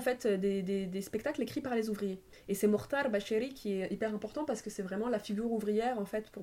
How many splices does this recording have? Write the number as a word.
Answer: one